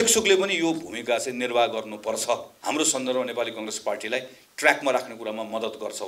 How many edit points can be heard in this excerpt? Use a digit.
1